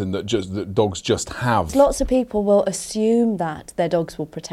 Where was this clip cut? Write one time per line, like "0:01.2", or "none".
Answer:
0:01.7